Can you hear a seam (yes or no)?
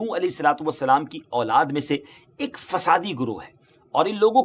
no